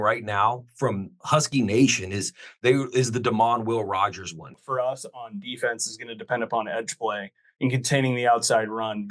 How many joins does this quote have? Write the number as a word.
one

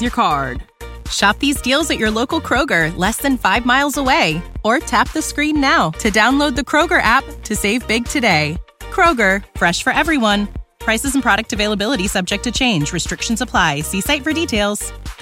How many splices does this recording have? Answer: zero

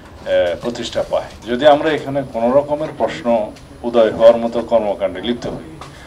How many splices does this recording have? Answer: one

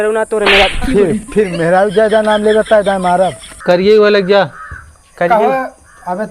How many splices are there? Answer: one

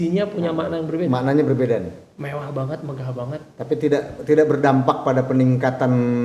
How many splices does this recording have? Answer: one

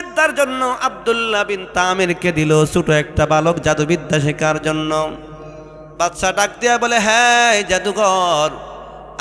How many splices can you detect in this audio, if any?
zero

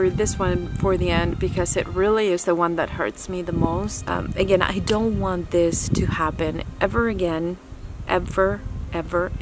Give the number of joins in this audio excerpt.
one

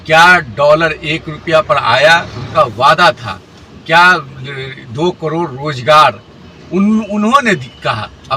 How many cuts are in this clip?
zero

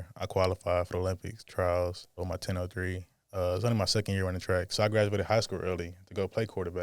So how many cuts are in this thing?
one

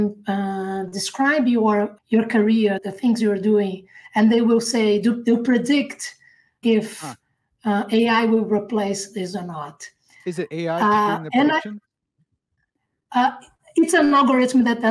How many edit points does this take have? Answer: three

